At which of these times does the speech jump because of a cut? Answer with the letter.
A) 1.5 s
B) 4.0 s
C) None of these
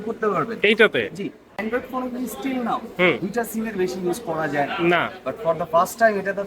A